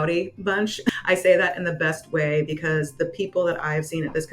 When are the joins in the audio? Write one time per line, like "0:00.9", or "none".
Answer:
0:00.9